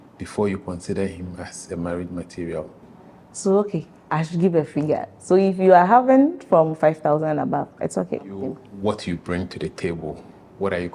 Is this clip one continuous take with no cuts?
no; 2 cuts; at 2.9 s, 8.4 s

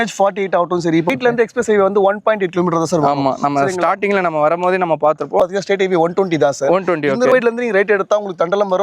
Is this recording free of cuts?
no; 3 cuts; at 1.2 s, 5.4 s, 7.3 s

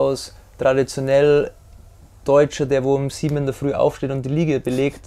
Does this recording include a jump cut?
no; 0 cuts

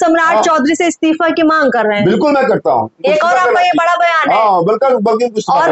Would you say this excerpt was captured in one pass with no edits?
yes; 0 cuts

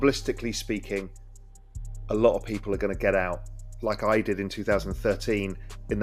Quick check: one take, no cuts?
yes; 0 cuts

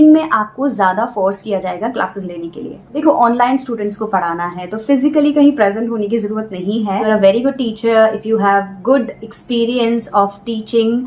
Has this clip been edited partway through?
yes; 2 cuts; at 2.9 s, 7.0 s

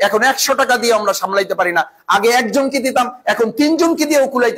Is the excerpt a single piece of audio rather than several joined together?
yes; 0 cuts

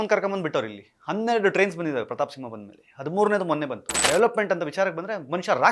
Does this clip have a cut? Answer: yes; 1 cut; at 4.0 s

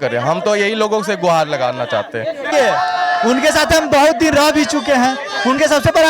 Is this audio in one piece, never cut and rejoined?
no; 1 cut; at 2.5 s

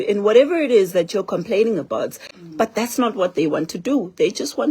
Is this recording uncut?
no; 1 cut; at 2.3 s

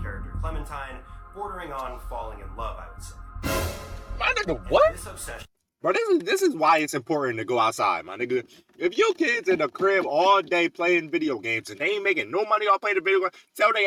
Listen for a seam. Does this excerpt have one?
no; 0 cuts

